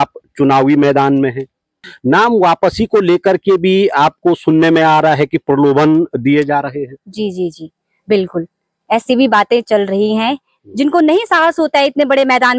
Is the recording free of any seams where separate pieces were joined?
no; 2 cuts; at 1.9 s, 10.5 s

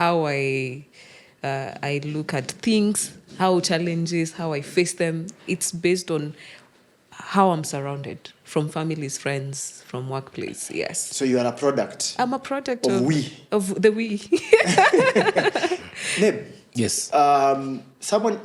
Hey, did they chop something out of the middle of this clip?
no; 0 cuts

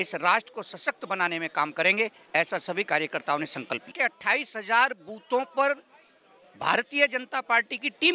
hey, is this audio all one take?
no; 1 cut; at 3.9 s

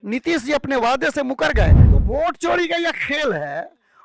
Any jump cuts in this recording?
yes; 1 cut; at 1.8 s

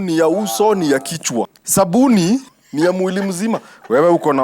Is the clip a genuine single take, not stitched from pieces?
no; 2 cuts; at 1.6 s, 2.6 s

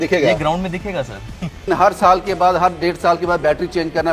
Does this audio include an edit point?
yes; 1 cut; at 1.7 s

